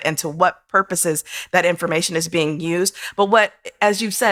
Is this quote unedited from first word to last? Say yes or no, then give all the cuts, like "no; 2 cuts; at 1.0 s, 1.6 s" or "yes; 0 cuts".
yes; 0 cuts